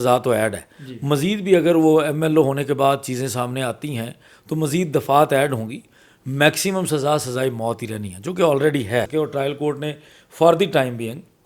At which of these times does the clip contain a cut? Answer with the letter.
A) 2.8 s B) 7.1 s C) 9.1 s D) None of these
C